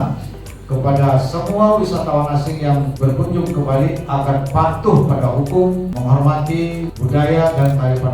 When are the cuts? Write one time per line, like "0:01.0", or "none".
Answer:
0:02.9
0:05.9
0:07.0